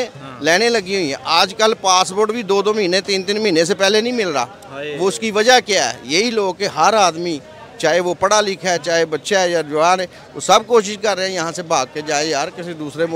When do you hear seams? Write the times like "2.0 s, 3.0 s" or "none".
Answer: none